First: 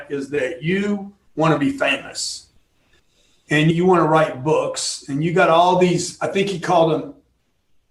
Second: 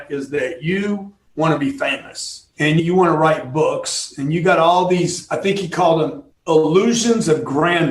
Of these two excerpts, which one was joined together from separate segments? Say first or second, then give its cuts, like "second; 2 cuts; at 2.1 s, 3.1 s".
second; 2 cuts; at 2.8 s, 6.3 s